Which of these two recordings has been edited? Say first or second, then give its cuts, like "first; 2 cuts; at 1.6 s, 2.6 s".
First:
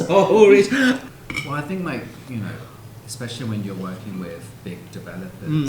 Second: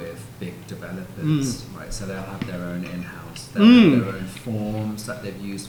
first; 1 cut; at 1.0 s